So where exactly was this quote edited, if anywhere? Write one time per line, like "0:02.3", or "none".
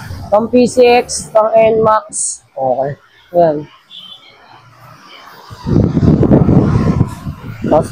none